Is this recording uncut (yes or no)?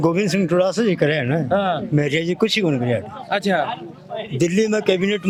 yes